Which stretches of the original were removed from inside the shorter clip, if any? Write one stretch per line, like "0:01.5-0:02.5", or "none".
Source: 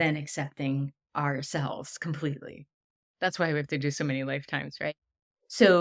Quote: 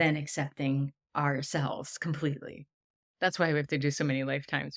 none